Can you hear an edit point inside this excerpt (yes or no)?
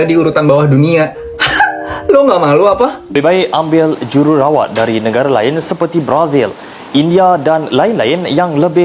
yes